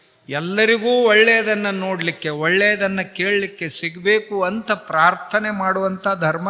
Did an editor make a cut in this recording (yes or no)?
no